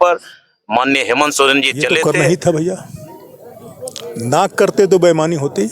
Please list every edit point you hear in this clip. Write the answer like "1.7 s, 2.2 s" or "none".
2.0 s